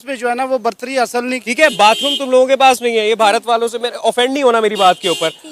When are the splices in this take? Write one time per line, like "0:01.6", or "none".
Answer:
0:01.4